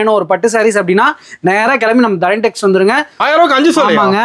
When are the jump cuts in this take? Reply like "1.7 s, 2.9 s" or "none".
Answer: 3.2 s